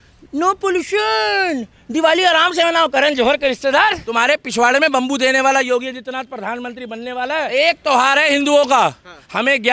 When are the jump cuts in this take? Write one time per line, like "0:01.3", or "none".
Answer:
0:04.1
0:07.5